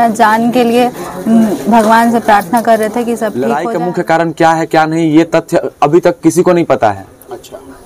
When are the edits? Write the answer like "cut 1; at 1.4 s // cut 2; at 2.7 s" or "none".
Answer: cut 1; at 3.5 s